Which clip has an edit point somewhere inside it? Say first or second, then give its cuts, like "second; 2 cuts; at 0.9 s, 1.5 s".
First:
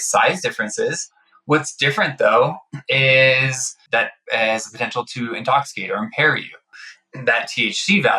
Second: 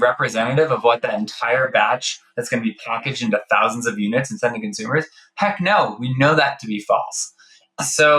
first; 2 cuts; at 4.1 s, 6.7 s